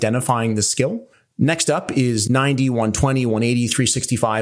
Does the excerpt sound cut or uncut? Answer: cut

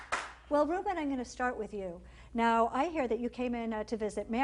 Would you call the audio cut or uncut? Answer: uncut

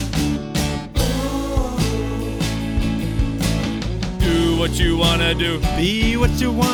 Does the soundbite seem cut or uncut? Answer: uncut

